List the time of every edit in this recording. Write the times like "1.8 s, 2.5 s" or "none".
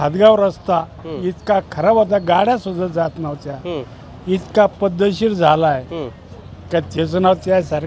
none